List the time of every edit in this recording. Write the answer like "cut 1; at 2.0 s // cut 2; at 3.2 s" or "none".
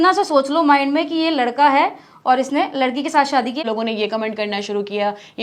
cut 1; at 3.6 s